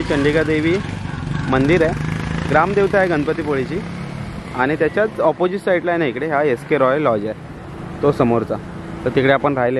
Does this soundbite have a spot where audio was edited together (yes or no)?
no